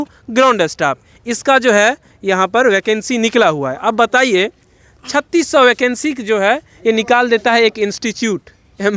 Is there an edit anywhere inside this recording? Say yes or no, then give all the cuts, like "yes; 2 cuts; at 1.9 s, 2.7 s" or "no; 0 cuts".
no; 0 cuts